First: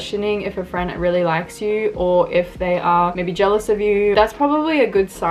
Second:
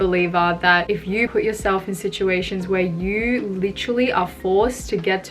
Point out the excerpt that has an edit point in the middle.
second; 1 cut; at 1.3 s

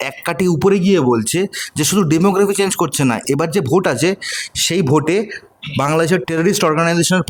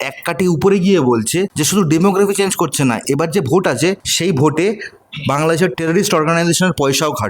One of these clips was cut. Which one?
second; 2 cuts; at 1.6 s, 4.1 s

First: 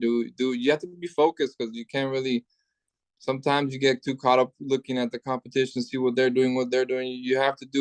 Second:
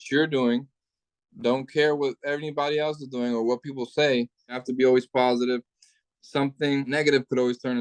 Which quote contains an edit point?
second; 2 cuts; at 4.6 s, 6.9 s

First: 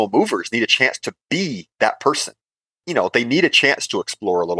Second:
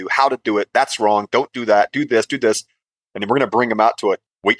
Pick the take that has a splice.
first; 1 cut; at 2.8 s

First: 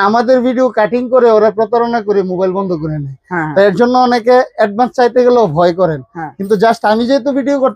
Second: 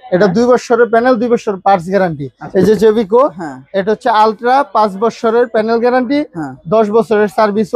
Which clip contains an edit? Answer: second; 1 cut; at 2.3 s

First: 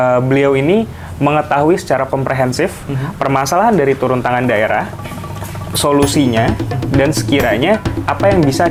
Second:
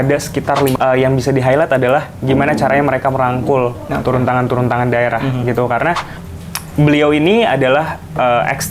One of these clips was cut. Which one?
second; 2 cuts; at 0.7 s, 6.2 s

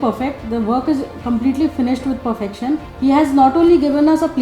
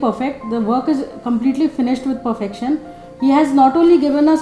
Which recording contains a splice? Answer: first; 1 cut; at 2.9 s

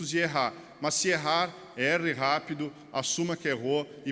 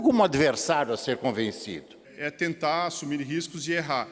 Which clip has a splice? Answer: second; 1 cut; at 2.1 s

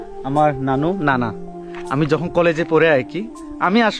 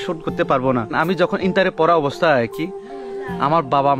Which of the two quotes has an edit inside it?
second; 1 cut; at 0.9 s

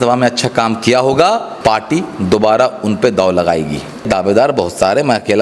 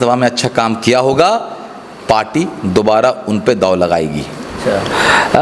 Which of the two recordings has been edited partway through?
first; 2 cuts; at 1.5 s, 4.1 s

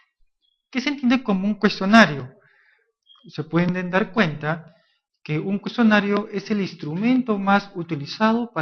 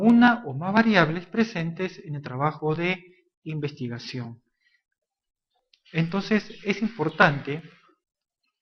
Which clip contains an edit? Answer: second; 1 cut; at 1.9 s

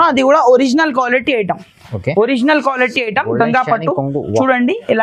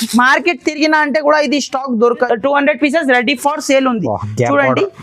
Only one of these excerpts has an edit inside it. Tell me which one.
second; 1 cut; at 2.3 s

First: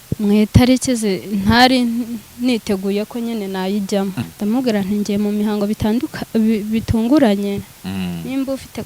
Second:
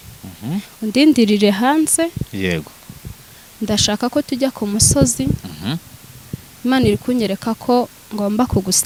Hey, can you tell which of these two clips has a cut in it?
first; 1 cut; at 4.2 s

